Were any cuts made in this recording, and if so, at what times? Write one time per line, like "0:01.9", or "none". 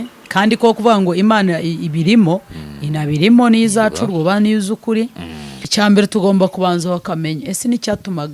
0:05.6